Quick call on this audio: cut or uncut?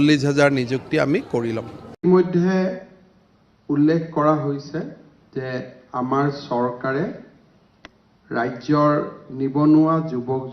cut